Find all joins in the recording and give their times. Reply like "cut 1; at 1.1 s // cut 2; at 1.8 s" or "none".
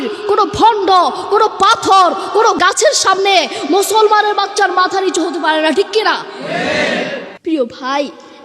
cut 1; at 7.3 s